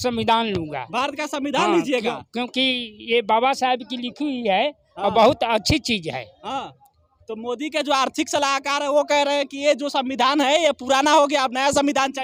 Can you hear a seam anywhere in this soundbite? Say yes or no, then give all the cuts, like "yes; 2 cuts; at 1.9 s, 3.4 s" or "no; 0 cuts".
no; 0 cuts